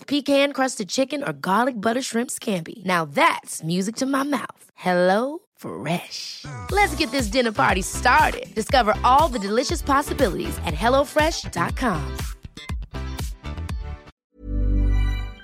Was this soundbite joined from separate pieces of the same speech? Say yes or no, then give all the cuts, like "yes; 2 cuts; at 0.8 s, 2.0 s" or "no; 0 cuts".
yes; 1 cut; at 14.1 s